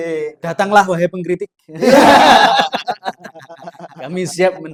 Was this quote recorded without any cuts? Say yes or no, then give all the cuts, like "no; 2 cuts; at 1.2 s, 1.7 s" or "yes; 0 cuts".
yes; 0 cuts